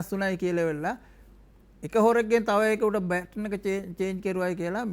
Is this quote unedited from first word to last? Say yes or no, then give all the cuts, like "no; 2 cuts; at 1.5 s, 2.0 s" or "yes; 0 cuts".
yes; 0 cuts